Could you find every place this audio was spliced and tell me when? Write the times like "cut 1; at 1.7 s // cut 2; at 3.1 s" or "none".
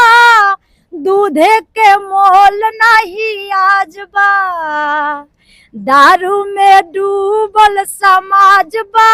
none